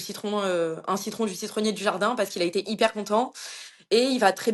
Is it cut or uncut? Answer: uncut